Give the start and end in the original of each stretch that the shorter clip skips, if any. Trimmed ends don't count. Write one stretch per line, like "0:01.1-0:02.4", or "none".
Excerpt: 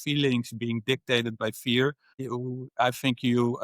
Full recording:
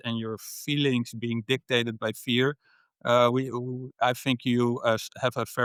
0:02.9-0:03.5

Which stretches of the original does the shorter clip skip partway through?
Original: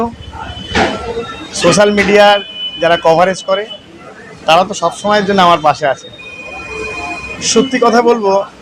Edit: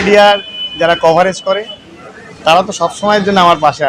none

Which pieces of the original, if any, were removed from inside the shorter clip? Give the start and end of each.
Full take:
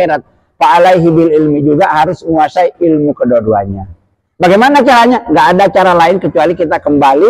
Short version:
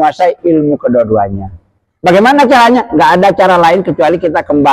none

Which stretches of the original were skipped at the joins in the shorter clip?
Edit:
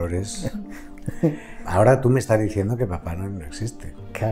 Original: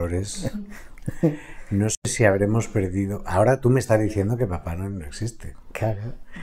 0:01.6-0:03.2

